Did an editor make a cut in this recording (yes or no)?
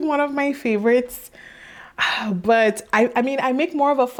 no